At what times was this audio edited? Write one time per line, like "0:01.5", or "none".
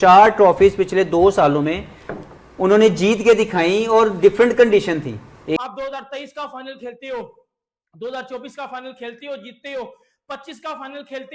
0:05.6